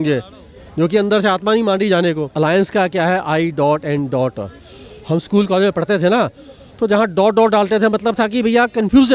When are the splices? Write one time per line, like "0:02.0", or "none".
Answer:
0:02.3

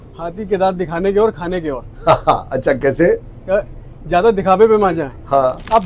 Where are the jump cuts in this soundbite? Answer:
none

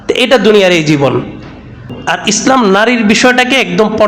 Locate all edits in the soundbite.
0:01.9

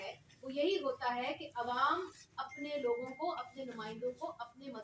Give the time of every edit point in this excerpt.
none

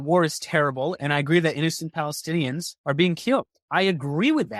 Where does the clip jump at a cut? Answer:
0:02.7
0:03.6

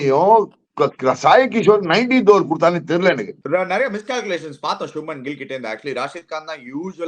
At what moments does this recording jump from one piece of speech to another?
0:03.3

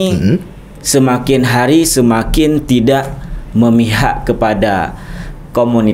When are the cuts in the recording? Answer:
none

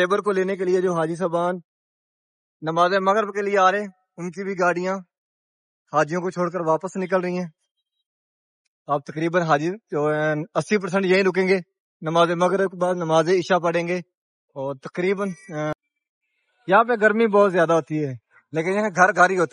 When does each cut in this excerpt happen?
0:15.7

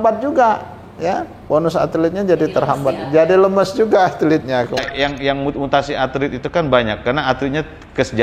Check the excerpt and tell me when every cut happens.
0:04.8

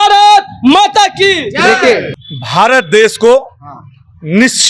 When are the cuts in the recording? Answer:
0:02.1

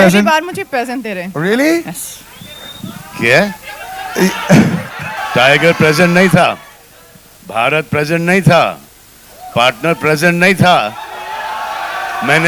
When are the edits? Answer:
0:05.2

